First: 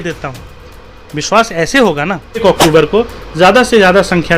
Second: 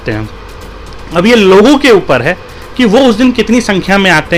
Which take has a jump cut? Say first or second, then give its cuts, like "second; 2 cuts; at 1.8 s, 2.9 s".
first; 1 cut; at 2.4 s